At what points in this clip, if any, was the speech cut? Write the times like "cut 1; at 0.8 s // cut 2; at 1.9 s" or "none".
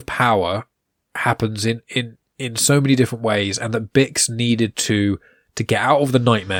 none

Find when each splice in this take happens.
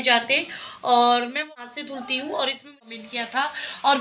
cut 1; at 1.3 s // cut 2; at 3.0 s

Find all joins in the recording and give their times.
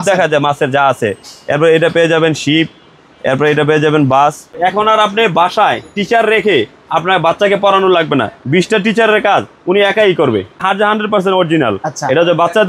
cut 1; at 4.5 s // cut 2; at 10.6 s

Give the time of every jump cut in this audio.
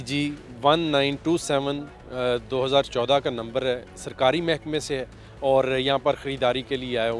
none

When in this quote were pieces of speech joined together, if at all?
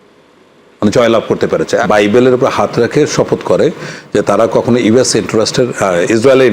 cut 1; at 1.9 s

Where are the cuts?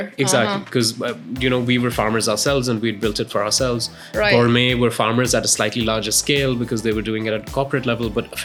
none

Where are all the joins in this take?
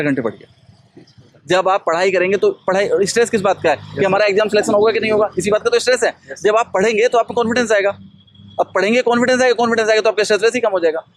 none

